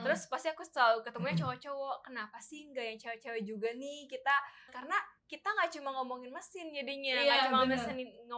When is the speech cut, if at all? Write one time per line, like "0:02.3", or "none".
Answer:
0:04.7